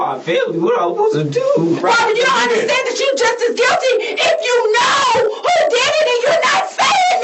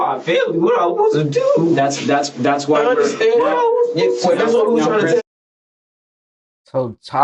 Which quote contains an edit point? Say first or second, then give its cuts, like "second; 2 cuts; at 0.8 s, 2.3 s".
first; 1 cut; at 1.8 s